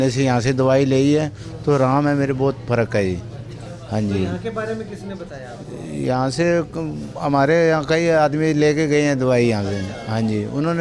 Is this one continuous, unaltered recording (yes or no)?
yes